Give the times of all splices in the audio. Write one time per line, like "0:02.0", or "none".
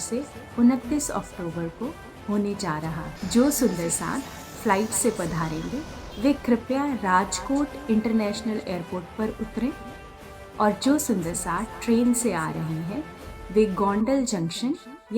0:03.1